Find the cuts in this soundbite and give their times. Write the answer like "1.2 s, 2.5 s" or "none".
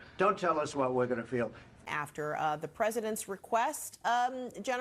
1.7 s